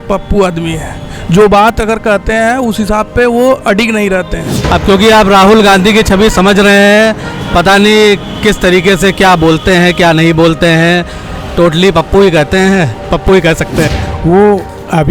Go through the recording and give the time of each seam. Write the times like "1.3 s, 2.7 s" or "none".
4.5 s, 14.0 s